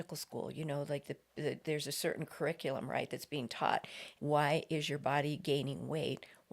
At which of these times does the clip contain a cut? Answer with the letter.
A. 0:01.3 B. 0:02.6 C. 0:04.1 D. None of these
C